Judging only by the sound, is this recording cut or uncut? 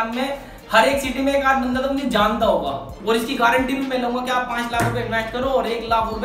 cut